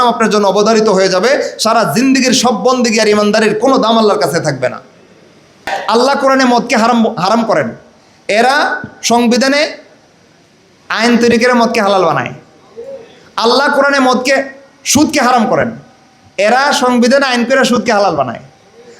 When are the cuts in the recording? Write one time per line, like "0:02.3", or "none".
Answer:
0:05.7